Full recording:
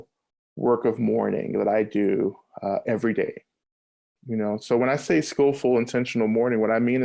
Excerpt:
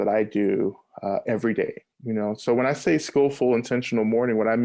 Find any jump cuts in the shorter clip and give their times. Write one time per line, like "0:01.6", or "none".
0:01.9